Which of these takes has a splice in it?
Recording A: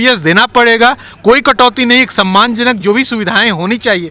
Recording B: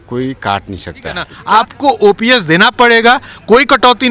B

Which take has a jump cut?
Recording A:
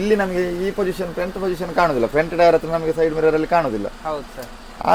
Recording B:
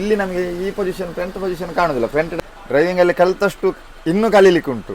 B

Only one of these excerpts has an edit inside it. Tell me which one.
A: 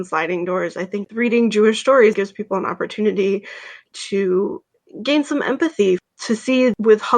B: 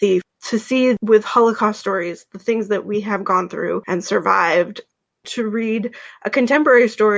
A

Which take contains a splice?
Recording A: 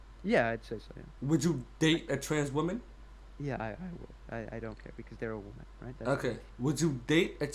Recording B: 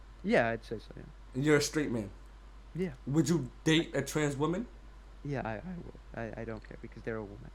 A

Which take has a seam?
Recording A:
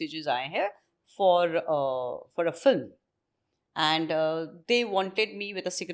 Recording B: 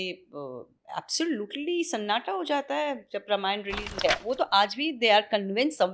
B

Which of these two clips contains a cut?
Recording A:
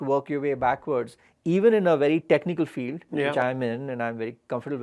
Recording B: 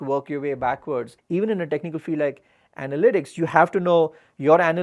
B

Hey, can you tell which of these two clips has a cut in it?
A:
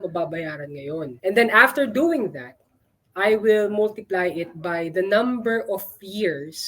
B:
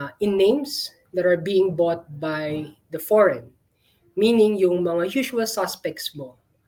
A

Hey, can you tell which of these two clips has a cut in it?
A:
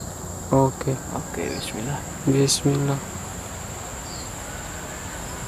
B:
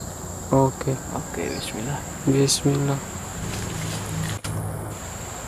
A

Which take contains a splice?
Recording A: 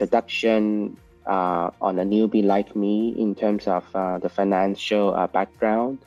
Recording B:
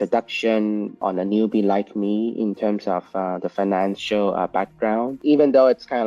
B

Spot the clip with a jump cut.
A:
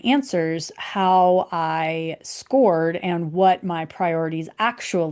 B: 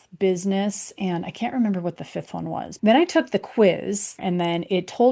B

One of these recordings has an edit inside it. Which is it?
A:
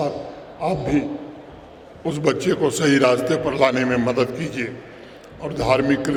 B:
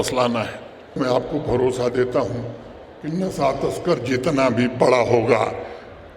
B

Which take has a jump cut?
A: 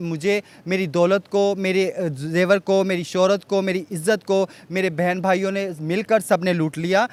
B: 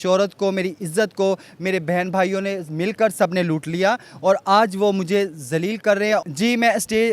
B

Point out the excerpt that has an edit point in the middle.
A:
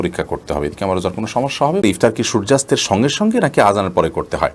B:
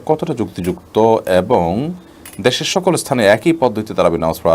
A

